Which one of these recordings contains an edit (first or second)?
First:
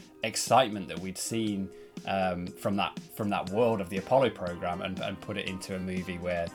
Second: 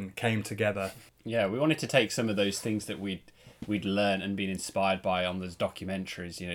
second